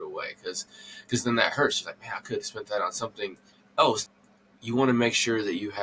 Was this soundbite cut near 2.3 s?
no; 1 cut; at 4.0 s

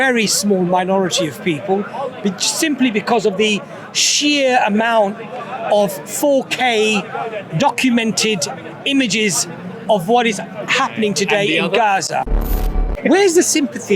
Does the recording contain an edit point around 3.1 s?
no; 1 cut; at 12.6 s

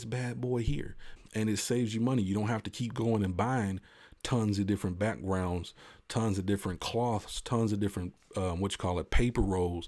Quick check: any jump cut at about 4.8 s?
no; 1 cut; at 1.1 s

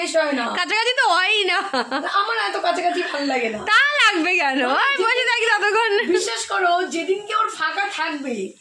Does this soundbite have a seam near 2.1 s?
no; 0 cuts

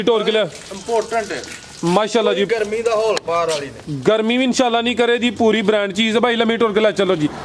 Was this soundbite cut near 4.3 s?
no; 0 cuts

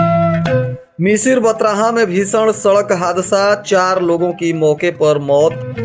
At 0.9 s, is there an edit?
yes; 1 cut; at 0.9 s

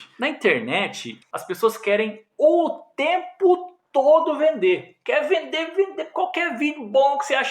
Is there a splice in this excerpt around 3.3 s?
no; 1 cut; at 1.1 s

